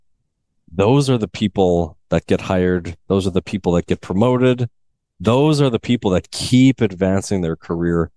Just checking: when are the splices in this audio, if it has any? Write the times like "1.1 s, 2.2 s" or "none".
none